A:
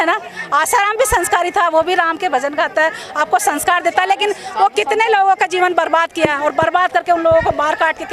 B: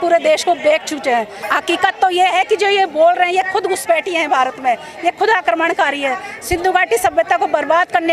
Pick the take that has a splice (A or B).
B